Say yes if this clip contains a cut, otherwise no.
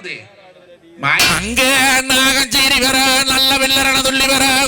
yes